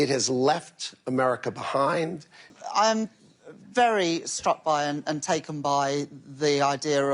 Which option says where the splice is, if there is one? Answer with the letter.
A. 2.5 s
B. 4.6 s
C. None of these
A